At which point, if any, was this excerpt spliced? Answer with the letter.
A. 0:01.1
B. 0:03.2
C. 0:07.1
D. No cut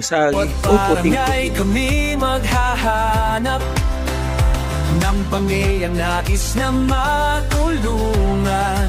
A